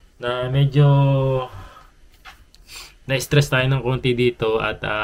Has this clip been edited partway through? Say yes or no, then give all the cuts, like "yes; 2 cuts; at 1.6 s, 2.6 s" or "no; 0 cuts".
no; 0 cuts